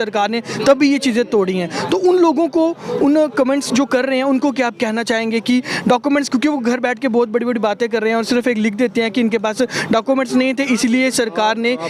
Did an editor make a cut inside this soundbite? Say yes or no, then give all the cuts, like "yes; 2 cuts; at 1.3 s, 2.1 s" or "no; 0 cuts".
no; 0 cuts